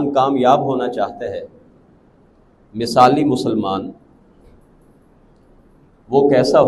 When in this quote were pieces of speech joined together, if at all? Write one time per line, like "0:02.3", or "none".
none